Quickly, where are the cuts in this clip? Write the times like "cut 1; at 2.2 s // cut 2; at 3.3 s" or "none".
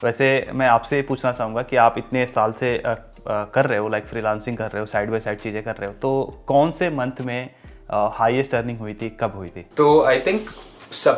none